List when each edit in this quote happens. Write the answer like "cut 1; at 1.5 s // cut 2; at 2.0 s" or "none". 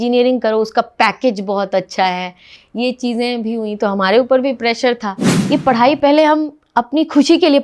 cut 1; at 5.3 s

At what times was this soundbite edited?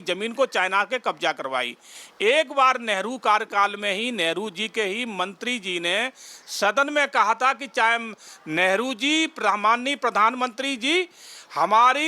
none

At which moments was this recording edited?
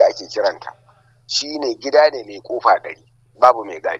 none

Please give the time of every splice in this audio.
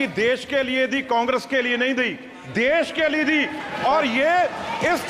none

